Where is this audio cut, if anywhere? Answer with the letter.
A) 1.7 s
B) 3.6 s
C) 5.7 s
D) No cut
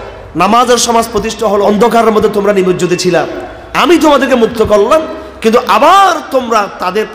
A